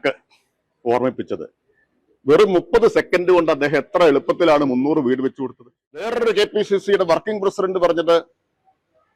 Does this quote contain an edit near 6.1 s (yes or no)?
yes